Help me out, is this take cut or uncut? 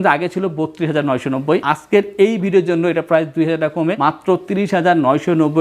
cut